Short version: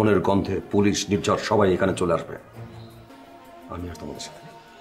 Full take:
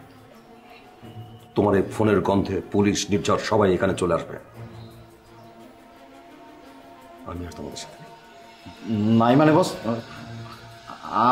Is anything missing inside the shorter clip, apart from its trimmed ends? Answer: yes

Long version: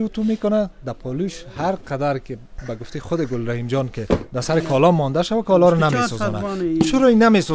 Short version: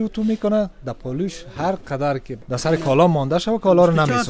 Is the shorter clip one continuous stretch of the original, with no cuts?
no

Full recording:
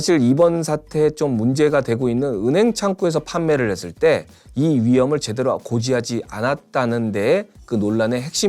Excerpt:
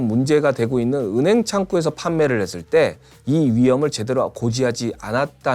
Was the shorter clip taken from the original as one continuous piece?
yes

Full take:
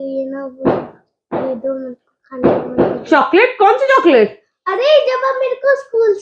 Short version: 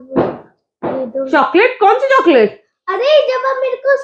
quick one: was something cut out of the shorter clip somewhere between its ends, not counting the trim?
yes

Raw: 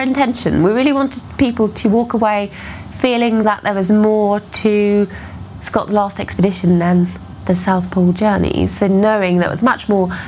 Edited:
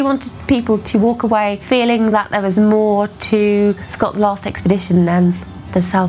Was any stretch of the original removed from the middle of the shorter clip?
yes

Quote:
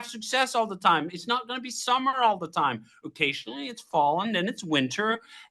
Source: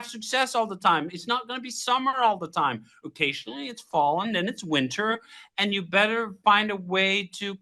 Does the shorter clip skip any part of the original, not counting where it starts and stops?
no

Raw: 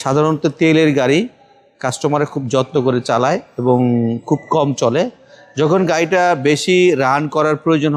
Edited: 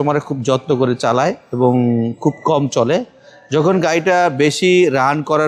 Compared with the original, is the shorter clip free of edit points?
yes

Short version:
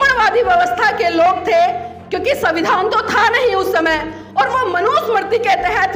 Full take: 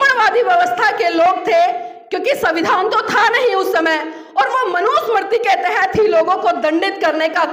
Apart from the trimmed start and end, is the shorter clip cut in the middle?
no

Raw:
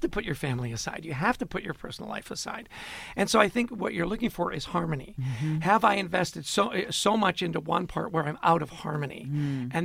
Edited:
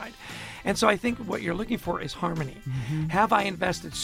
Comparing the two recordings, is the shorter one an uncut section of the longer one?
yes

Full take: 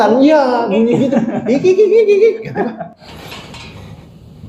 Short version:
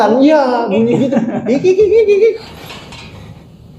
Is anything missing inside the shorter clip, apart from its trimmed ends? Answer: yes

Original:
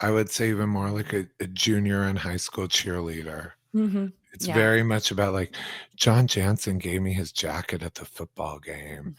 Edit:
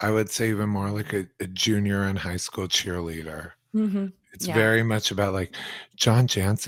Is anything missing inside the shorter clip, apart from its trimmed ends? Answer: no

